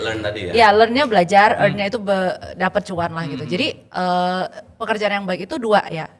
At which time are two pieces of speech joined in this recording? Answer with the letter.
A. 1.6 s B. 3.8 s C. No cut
C